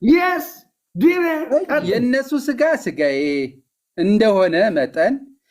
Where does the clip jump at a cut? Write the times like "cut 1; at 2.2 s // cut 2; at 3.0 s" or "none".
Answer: cut 1; at 1.9 s